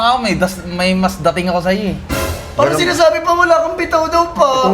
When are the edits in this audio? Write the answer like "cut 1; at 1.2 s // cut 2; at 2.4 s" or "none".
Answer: none